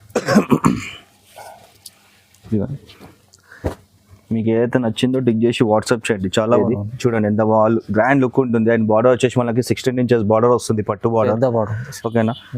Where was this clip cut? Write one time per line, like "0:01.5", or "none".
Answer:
0:06.6